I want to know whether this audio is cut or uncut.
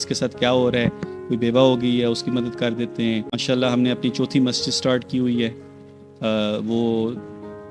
cut